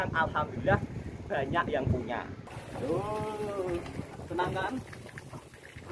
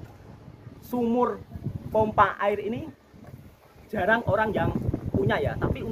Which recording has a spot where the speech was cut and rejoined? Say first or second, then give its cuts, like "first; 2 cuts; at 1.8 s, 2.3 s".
first; 1 cut; at 2.5 s